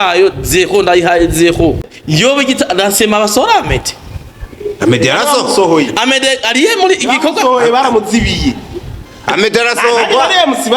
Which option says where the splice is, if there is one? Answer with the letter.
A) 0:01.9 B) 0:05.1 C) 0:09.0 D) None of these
A